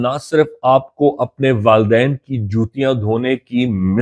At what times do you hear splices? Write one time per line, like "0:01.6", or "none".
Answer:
none